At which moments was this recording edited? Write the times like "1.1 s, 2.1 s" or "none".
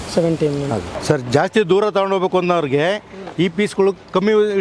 0.9 s